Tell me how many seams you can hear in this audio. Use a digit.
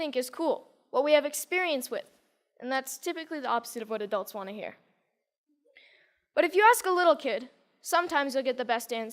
1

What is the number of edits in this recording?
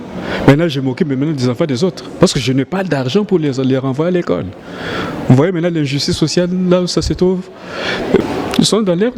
1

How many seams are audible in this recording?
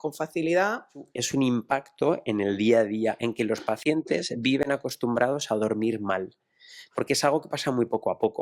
1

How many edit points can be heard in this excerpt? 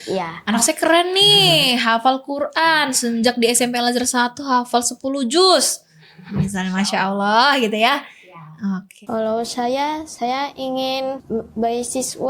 2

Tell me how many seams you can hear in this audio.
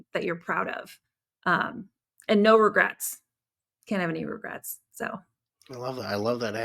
0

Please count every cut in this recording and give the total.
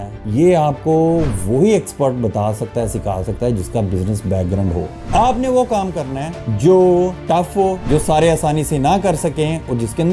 2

